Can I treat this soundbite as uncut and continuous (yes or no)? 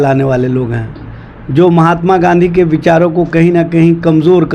yes